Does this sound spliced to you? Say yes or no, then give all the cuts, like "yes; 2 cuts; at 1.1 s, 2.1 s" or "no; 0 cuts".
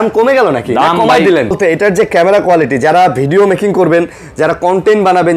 yes; 1 cut; at 1.5 s